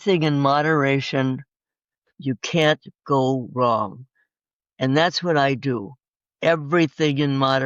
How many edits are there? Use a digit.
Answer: 0